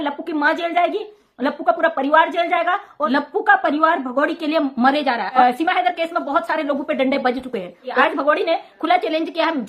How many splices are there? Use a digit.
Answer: 3